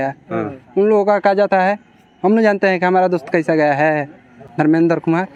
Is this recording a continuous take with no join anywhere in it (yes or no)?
yes